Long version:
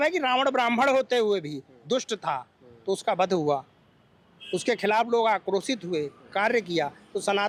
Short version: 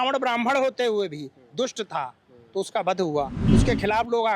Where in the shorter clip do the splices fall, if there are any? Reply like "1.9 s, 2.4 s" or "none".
3.4 s

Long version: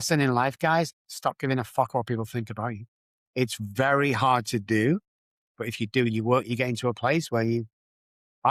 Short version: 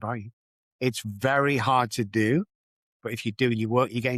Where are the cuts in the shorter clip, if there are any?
none

